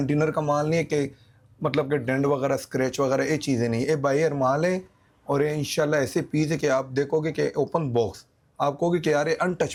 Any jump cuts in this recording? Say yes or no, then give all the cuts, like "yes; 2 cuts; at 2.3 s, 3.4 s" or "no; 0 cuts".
no; 0 cuts